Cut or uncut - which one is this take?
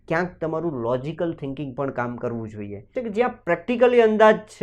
cut